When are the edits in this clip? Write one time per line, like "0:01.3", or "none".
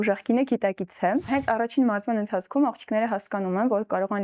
0:01.3